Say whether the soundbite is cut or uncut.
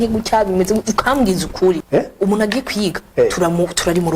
cut